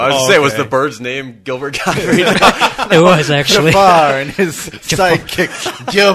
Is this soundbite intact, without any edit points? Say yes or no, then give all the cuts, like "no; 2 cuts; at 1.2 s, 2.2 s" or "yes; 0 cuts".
yes; 0 cuts